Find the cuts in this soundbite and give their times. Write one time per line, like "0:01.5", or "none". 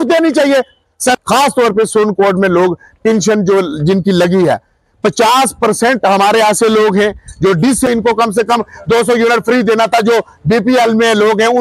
0:01.2
0:07.9